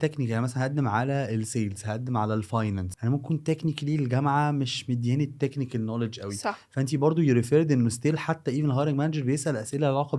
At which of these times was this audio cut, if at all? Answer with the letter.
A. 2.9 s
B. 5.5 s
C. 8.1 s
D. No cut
A